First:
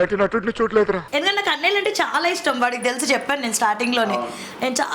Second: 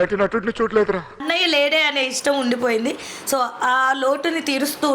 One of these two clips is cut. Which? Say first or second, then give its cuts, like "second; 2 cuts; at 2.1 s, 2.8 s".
second; 1 cut; at 1.1 s